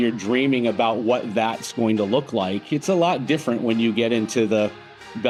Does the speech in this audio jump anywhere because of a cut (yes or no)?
no